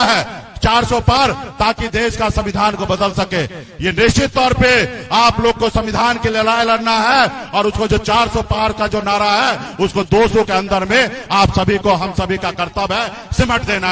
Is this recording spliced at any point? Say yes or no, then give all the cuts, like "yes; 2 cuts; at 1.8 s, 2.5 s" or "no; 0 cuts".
no; 0 cuts